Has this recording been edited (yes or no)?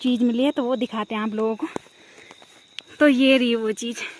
no